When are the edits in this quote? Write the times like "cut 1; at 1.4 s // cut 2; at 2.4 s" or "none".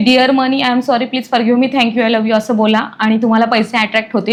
none